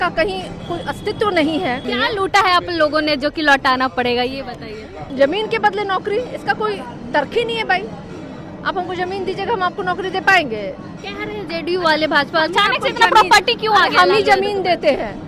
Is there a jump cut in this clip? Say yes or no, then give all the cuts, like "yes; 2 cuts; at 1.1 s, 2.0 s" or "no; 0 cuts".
yes; 2 cuts; at 1.9 s, 5.1 s